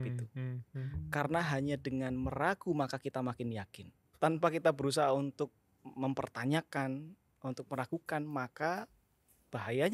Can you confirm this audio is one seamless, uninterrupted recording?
no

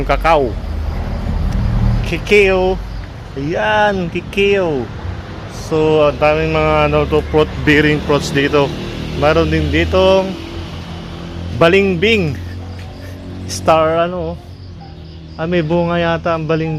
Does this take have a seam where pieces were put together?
no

